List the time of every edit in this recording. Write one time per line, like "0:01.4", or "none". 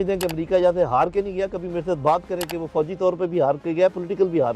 none